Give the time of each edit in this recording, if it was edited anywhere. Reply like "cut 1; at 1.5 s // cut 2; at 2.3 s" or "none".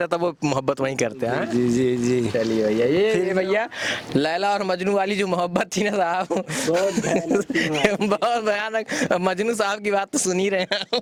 none